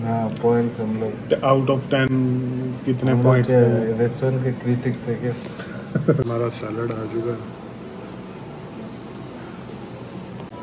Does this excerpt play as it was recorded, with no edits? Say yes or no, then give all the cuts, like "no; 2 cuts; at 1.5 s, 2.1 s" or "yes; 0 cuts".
yes; 0 cuts